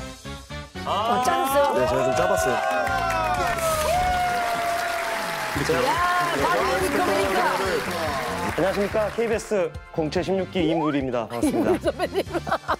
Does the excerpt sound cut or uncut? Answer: uncut